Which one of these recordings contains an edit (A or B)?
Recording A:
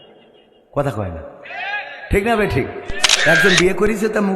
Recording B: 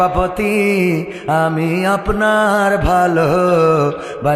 A